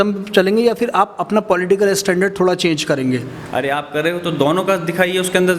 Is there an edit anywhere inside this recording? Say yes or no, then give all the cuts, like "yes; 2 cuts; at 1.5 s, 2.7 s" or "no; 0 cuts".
yes; 1 cut; at 3.4 s